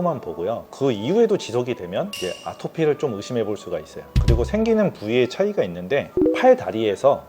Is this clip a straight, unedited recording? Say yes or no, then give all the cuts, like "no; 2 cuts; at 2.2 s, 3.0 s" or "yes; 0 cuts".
no; 1 cut; at 6.1 s